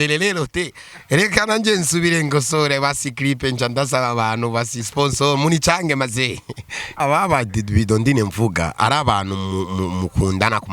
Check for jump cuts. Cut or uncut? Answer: cut